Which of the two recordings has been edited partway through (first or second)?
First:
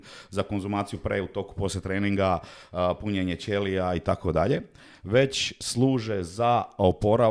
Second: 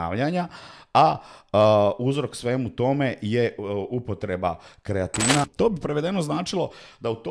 second